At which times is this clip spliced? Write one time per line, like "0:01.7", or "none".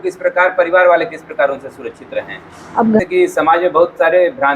0:03.0